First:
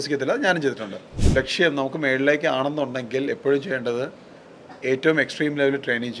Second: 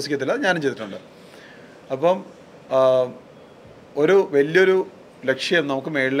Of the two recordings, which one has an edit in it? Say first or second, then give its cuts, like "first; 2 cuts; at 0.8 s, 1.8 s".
first; 1 cut; at 1.1 s